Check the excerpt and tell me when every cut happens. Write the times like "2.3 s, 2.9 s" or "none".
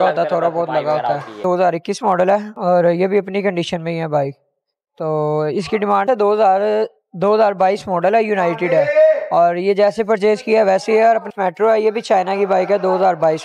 1.4 s, 6.0 s, 11.3 s